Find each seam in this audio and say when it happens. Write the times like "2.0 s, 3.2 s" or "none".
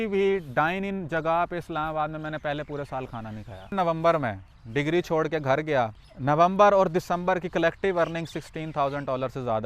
3.7 s, 6.1 s